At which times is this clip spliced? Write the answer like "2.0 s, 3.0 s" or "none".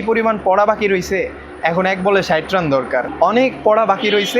3.1 s